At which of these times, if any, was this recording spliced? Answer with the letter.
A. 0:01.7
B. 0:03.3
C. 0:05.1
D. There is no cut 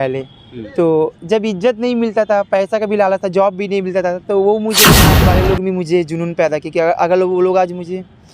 C